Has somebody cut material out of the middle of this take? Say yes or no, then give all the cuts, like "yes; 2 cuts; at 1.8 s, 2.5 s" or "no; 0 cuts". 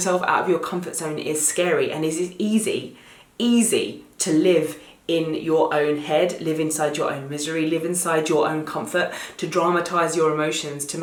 no; 0 cuts